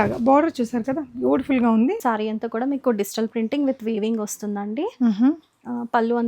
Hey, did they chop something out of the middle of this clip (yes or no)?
yes